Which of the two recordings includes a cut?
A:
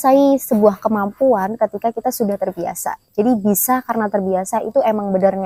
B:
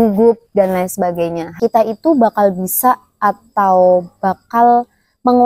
B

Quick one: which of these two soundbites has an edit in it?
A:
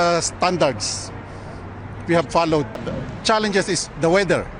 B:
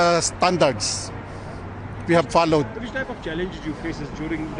A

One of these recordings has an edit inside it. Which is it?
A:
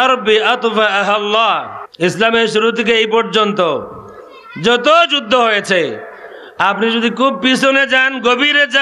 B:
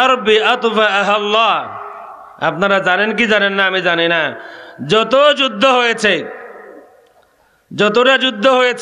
A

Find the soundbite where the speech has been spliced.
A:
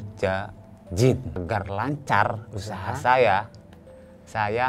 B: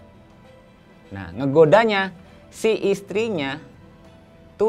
A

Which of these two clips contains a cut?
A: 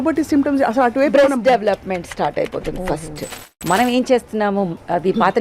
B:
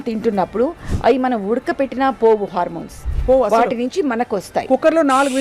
A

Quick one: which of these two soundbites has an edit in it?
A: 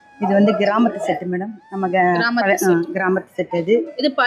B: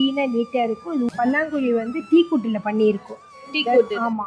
B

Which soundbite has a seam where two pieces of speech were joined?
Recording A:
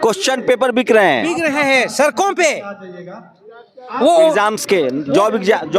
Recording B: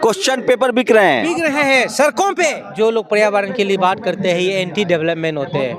B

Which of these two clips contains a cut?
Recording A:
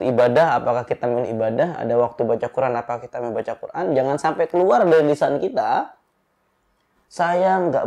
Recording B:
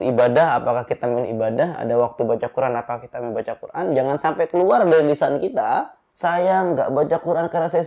B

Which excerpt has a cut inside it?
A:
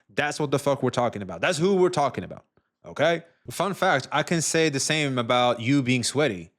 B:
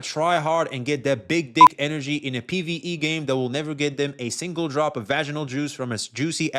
A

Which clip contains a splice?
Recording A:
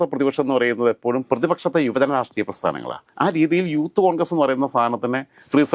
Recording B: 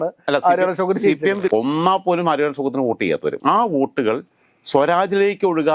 B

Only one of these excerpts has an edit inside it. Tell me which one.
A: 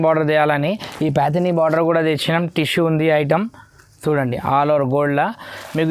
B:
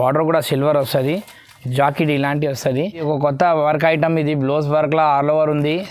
B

